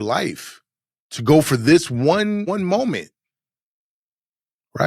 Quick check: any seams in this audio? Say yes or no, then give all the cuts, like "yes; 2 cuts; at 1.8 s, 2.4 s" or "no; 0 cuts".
yes; 1 cut; at 2.4 s